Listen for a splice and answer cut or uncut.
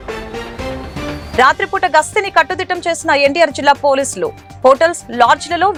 uncut